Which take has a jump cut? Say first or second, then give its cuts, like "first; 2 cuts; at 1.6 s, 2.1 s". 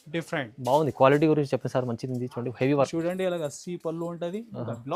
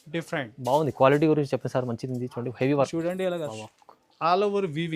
second; 1 cut; at 3.6 s